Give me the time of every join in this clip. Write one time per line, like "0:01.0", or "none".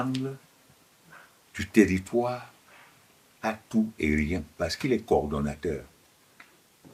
none